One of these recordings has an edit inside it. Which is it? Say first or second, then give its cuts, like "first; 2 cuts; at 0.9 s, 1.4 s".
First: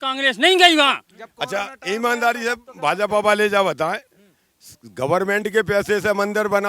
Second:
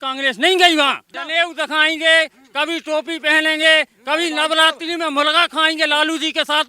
second; 1 cut; at 1.1 s